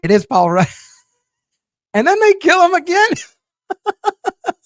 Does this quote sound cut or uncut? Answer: uncut